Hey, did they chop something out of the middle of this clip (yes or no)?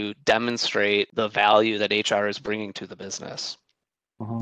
yes